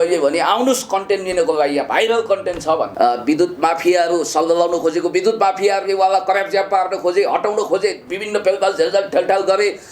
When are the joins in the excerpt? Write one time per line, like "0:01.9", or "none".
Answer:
0:02.9